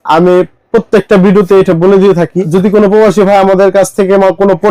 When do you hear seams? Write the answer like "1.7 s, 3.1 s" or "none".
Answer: 2.4 s